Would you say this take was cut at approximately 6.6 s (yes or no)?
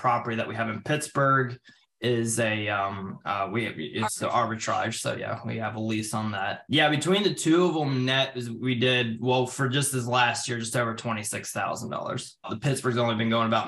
yes